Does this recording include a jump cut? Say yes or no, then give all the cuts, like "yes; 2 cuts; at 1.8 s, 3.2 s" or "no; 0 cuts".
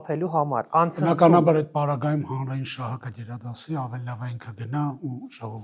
no; 0 cuts